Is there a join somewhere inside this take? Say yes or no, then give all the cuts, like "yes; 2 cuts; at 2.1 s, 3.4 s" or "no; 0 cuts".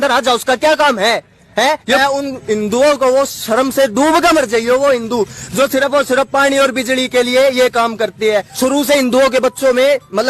yes; 2 cuts; at 1.8 s, 8.5 s